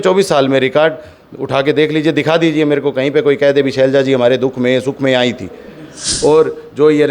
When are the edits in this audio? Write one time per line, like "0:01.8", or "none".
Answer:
0:06.0